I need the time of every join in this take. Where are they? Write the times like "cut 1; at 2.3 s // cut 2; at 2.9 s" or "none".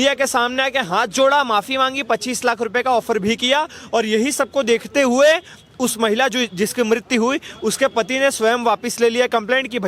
none